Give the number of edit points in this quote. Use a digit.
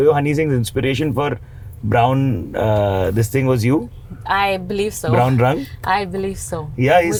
0